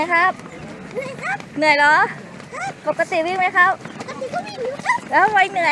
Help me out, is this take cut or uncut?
uncut